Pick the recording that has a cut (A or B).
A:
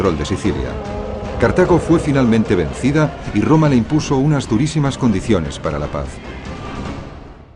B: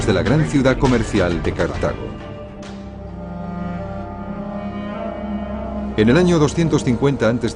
A